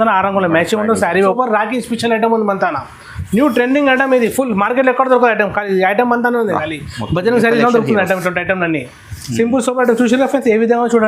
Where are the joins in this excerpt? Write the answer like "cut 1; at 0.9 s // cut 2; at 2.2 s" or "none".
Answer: cut 1; at 1.2 s